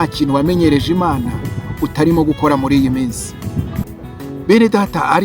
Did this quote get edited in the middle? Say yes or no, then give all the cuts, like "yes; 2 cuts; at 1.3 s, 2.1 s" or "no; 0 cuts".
yes; 1 cut; at 4.0 s